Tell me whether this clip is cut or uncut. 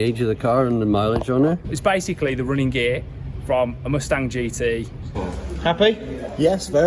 cut